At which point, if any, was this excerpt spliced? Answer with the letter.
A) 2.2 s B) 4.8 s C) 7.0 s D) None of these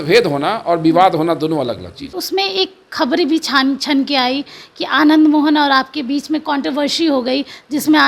A